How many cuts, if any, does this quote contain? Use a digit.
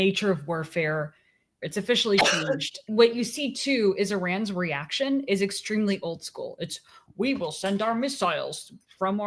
2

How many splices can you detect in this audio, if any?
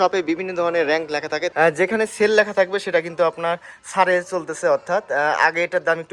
1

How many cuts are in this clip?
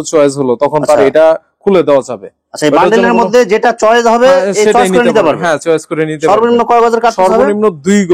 0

